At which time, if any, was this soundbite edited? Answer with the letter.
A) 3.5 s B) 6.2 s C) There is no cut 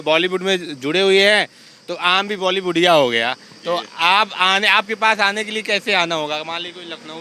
C